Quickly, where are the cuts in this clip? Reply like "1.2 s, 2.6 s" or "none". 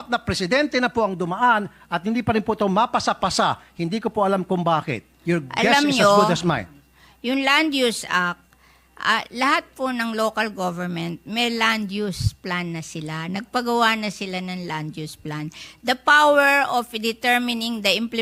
none